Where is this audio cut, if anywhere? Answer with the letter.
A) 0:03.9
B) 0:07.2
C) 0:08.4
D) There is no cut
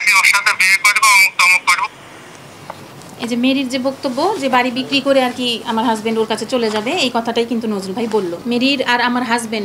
C